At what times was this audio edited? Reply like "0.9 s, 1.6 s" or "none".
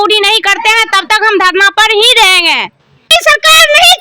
3.1 s